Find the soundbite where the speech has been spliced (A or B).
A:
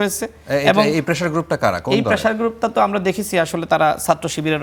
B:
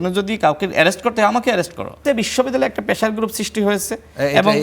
B